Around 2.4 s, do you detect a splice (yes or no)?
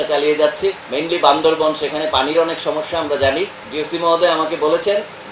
no